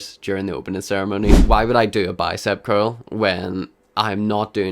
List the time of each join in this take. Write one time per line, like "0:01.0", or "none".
0:01.4